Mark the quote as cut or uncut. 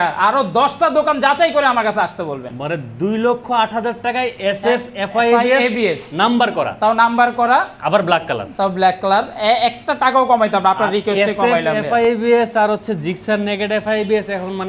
uncut